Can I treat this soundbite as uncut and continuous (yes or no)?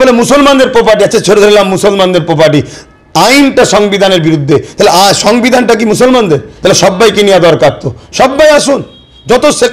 yes